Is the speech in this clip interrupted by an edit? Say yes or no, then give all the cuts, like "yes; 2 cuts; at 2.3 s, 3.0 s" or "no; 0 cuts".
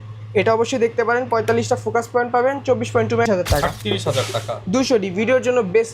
yes; 1 cut; at 3.3 s